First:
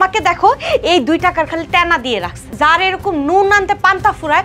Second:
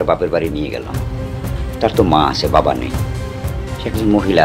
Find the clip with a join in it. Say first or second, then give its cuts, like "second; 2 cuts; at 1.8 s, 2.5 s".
first; 1 cut; at 2.4 s